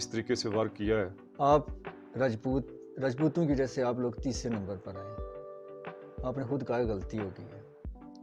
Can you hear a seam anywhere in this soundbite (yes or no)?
yes